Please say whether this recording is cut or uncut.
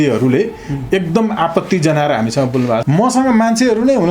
cut